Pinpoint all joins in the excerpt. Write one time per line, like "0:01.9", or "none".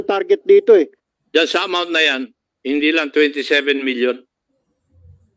0:01.0